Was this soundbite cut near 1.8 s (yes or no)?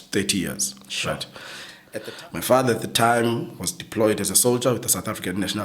yes